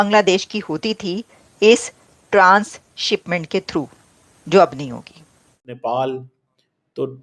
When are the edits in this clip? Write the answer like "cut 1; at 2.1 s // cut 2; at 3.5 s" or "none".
cut 1; at 5.8 s